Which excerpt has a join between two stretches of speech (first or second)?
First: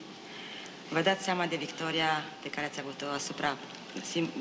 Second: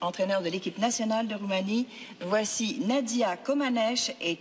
second